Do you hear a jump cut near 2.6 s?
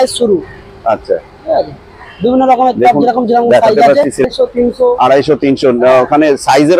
no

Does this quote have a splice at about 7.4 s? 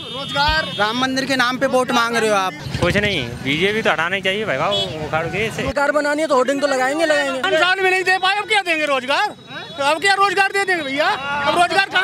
yes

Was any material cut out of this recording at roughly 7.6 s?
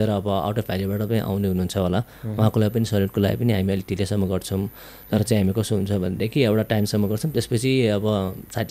no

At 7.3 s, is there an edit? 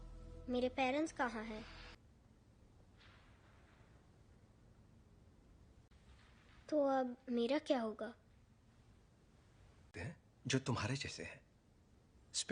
no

